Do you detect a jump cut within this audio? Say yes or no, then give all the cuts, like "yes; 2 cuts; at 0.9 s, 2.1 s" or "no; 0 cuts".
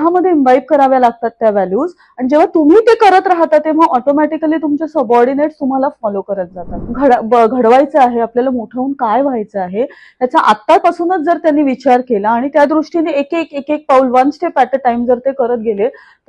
yes; 1 cut; at 6.8 s